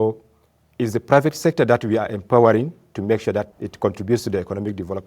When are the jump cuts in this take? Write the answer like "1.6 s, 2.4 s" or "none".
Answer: 3.5 s